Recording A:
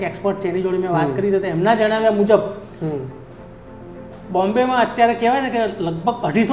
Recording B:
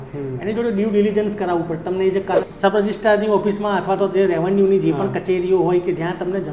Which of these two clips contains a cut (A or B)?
B